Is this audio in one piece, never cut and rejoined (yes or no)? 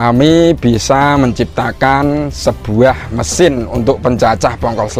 yes